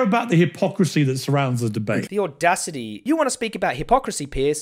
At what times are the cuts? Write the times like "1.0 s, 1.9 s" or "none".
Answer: 2.9 s